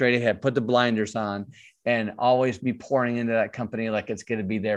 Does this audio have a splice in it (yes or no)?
no